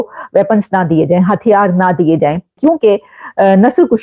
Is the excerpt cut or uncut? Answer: cut